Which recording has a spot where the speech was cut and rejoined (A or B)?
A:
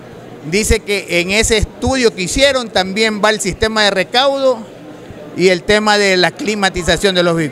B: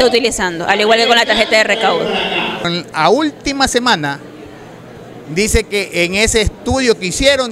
B